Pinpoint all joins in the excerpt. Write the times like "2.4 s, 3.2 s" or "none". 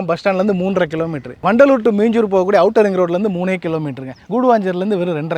1.3 s, 4.2 s